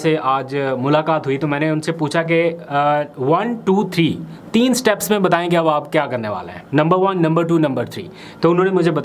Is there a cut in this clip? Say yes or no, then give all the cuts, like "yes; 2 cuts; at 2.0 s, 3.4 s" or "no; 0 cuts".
no; 0 cuts